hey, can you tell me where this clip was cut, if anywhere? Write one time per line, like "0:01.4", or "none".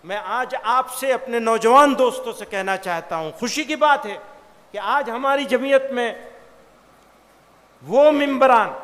none